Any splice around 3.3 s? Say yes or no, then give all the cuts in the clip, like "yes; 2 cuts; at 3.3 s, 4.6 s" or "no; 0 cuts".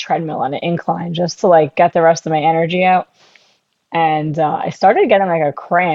no; 0 cuts